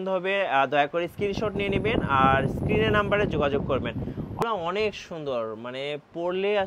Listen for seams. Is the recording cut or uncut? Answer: cut